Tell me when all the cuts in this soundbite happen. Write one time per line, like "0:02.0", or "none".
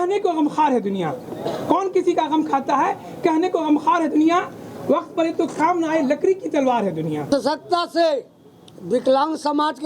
0:07.3